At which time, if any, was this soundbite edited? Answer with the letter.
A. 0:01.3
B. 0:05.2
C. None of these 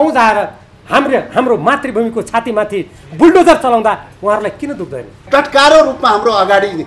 B